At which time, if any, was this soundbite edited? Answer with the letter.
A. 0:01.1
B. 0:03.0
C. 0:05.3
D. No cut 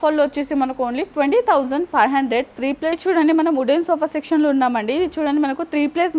B